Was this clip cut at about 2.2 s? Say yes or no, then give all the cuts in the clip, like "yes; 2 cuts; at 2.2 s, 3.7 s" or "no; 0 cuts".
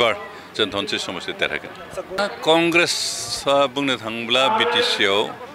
yes; 1 cut; at 2.2 s